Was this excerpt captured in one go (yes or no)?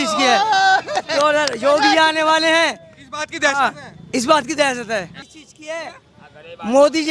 no